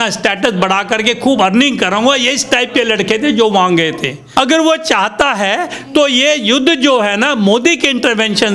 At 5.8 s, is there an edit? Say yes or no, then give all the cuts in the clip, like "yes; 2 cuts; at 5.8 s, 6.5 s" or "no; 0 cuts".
no; 1 cut; at 4.2 s